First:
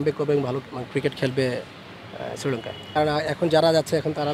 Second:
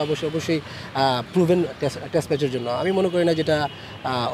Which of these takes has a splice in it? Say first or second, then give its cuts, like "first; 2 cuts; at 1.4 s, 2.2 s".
first; 1 cut; at 2.8 s